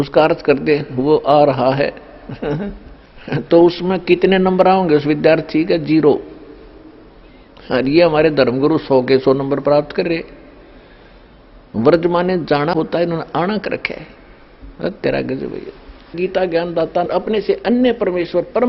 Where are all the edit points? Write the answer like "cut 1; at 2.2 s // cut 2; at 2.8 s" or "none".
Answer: cut 1; at 16.2 s // cut 2; at 17.1 s